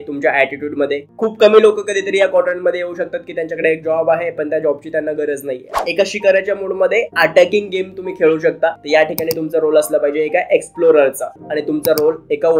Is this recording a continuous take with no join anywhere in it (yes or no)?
no